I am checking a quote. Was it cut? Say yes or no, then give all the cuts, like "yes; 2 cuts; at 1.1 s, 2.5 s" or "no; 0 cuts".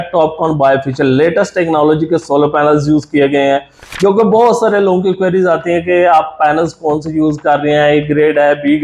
no; 0 cuts